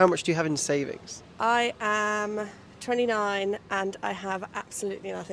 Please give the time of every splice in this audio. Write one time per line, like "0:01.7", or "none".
none